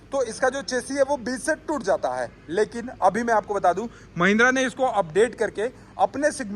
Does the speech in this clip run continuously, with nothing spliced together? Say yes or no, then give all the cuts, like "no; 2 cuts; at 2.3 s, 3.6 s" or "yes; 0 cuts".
yes; 0 cuts